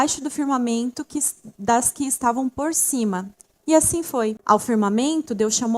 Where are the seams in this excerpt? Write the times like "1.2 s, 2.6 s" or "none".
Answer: 4.4 s